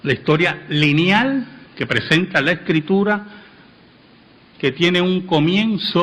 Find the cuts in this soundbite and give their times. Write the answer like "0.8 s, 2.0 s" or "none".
1.2 s